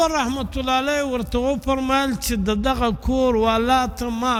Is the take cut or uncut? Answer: uncut